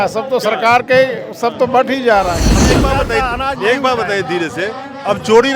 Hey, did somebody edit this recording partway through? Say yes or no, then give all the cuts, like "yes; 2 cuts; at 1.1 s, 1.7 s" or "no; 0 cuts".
yes; 1 cut; at 2.6 s